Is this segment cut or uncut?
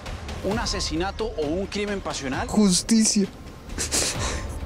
cut